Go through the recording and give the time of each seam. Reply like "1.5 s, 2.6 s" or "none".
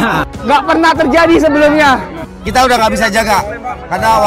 none